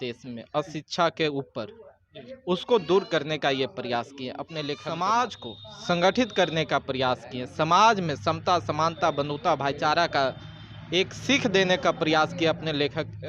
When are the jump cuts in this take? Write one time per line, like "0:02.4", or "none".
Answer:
0:04.8